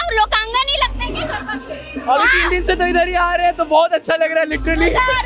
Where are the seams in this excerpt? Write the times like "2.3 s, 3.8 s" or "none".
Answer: none